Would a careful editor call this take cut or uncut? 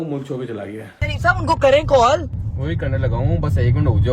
cut